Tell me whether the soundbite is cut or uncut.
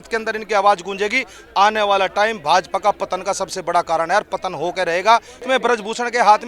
cut